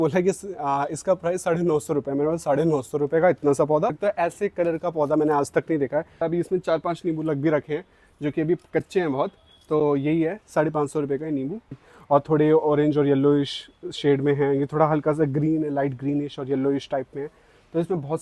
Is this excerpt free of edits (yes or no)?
no